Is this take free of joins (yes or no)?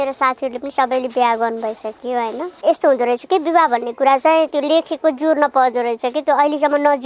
no